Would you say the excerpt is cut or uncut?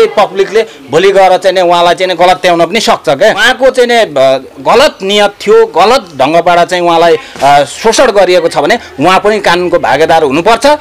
cut